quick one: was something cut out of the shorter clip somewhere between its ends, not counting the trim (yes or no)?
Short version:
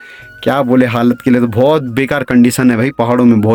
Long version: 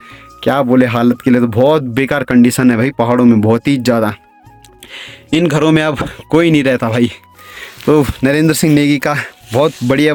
no